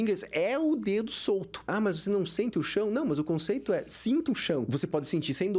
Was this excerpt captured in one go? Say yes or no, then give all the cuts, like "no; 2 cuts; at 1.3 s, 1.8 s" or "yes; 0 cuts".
no; 2 cuts; at 1.7 s, 4.7 s